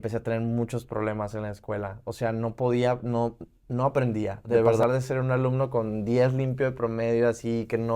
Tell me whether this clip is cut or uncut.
cut